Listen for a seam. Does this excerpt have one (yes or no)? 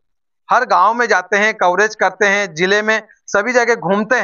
no